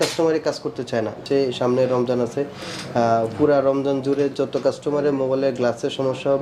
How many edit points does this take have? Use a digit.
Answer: 1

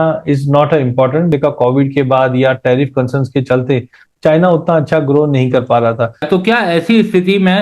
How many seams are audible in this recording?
2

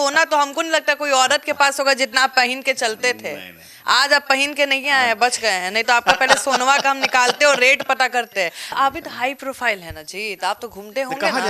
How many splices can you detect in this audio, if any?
1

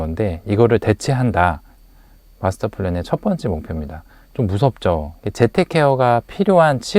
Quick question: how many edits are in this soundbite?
1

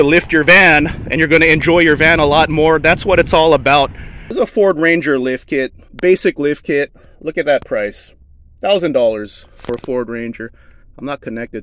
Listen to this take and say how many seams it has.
1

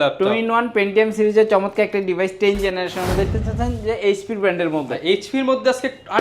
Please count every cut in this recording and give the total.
1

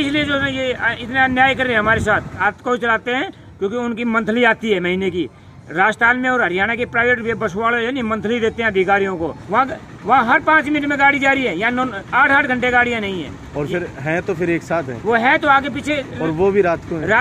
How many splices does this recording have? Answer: 2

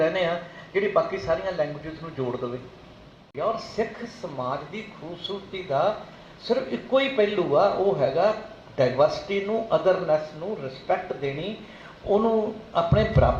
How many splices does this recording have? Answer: 1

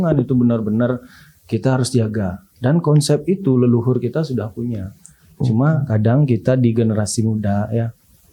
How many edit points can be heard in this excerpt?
0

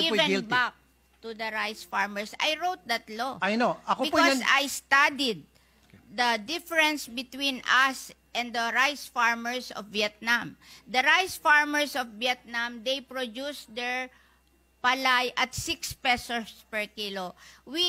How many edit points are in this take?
0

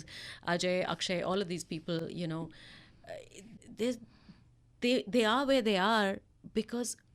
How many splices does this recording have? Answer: 0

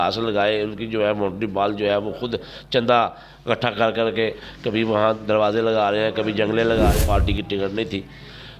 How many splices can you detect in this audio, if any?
2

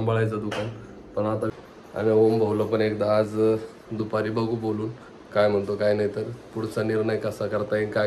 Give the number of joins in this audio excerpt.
1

